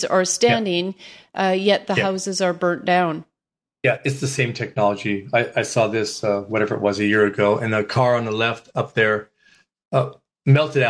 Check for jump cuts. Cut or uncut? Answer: uncut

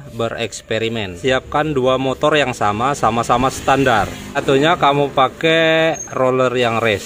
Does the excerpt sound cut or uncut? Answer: cut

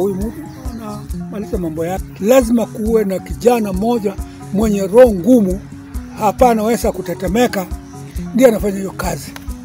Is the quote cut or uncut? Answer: cut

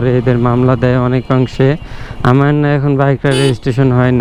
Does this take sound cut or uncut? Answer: uncut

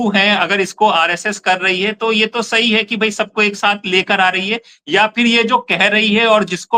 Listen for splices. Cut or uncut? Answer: uncut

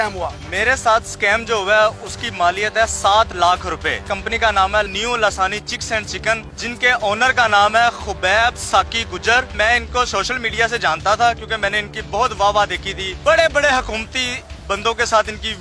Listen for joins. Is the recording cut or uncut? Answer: uncut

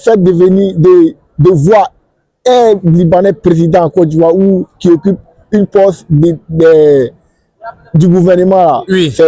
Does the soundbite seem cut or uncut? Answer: uncut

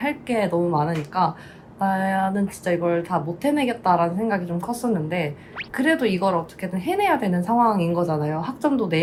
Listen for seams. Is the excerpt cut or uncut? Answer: uncut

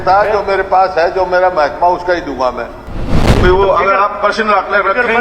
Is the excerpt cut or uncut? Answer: cut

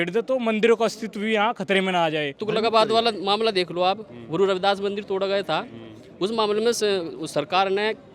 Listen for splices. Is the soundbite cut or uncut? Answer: cut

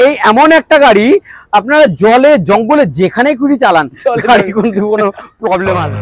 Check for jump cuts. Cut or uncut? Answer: uncut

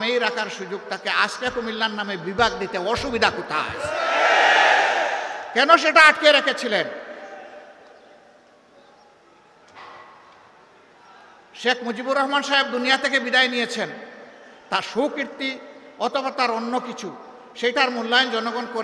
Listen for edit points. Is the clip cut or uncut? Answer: uncut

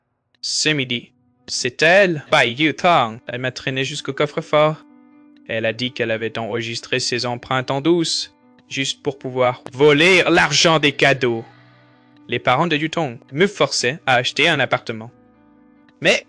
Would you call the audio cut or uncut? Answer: uncut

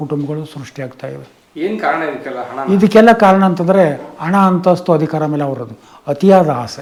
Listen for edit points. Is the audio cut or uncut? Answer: uncut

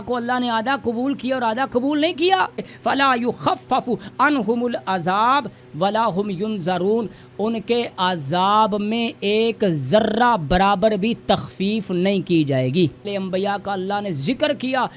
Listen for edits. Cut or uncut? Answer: cut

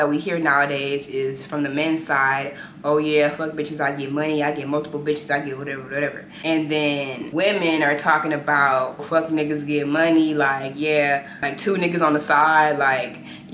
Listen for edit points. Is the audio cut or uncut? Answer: cut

